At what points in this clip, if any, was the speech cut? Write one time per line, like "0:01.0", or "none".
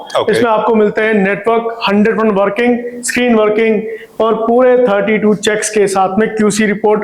none